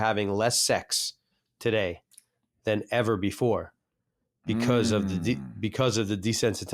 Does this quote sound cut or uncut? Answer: uncut